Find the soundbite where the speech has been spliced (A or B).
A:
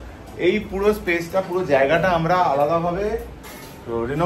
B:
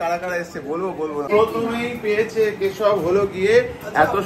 B